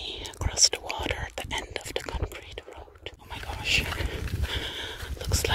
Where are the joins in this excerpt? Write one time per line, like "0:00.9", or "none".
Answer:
0:03.3